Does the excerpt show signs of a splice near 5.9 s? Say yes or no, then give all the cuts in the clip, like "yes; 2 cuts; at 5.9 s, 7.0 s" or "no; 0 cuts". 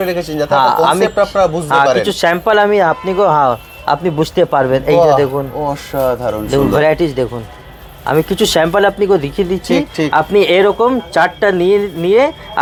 no; 0 cuts